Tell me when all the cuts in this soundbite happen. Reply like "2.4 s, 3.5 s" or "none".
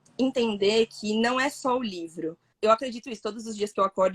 2.4 s